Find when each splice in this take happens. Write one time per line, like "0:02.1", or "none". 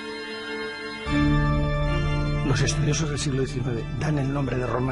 0:02.6